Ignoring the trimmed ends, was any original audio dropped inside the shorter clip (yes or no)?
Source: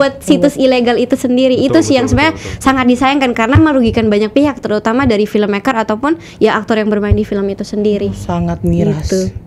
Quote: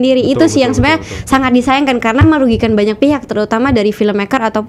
no